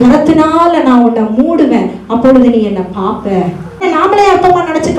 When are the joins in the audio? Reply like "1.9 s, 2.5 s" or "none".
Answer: 3.8 s